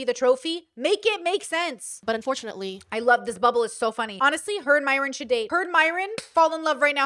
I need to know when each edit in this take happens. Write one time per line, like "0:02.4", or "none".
0:01.9
0:04.1
0:05.9